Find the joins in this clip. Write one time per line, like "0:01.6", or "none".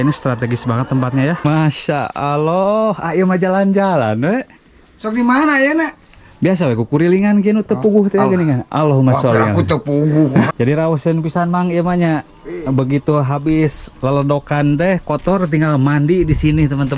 0:01.5
0:10.5